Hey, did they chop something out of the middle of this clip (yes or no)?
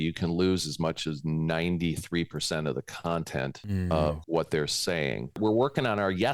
yes